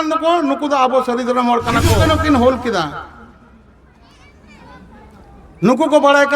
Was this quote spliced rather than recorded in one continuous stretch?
yes; 1 cut; at 2.0 s

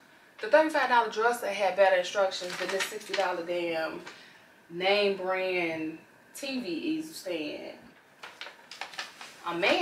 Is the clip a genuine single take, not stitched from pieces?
no; 1 cut; at 8.0 s

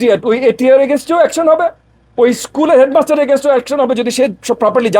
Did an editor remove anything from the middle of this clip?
no; 0 cuts

